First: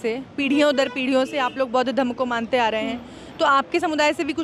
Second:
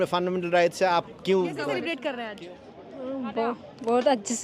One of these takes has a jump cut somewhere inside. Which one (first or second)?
second